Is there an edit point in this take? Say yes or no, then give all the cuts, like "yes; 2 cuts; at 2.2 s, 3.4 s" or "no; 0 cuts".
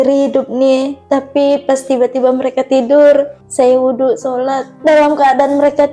yes; 3 cuts; at 1.0 s, 3.4 s, 4.7 s